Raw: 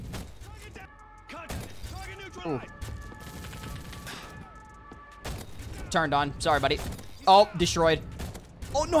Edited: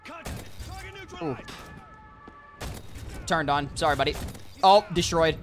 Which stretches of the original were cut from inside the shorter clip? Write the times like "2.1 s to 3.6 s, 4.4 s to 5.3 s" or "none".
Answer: 2.7 s to 4.1 s